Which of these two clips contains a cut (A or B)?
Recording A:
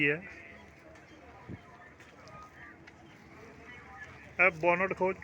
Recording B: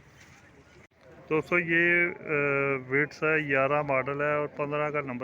B